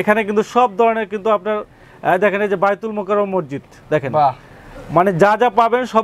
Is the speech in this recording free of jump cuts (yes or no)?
yes